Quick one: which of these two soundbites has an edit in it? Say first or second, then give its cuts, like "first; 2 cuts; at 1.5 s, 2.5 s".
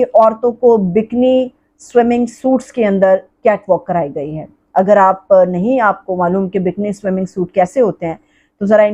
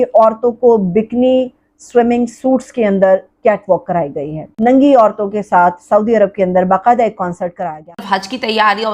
second; 2 cuts; at 4.5 s, 7.5 s